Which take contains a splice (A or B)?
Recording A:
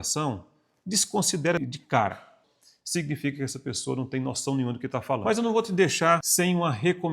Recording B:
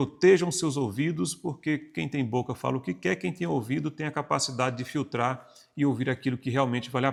A